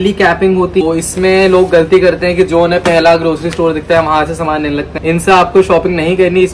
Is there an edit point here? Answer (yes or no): yes